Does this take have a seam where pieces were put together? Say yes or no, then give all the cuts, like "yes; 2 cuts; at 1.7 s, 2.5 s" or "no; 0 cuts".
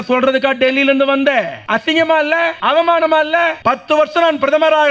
yes; 3 cuts; at 1.6 s, 2.6 s, 3.6 s